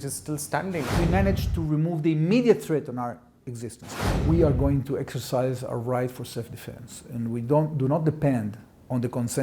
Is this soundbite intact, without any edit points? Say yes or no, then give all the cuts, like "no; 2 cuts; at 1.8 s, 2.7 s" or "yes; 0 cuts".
no; 2 cuts; at 0.9 s, 3.8 s